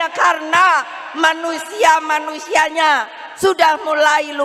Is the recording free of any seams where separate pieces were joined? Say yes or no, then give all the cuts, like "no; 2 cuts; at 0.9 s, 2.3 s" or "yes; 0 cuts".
yes; 0 cuts